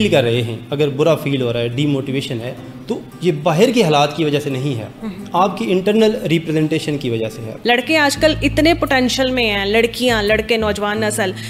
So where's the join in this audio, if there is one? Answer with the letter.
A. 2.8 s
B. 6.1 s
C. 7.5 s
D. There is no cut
C